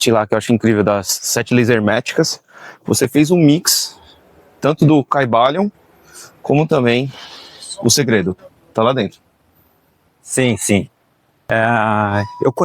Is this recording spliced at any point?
yes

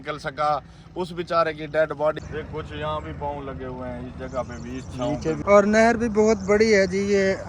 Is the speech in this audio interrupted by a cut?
yes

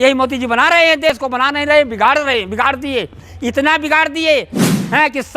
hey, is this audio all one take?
no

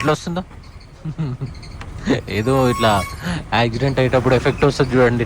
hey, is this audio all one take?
yes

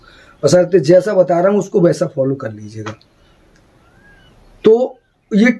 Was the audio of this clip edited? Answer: no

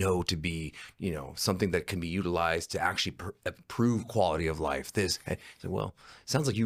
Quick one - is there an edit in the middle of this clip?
no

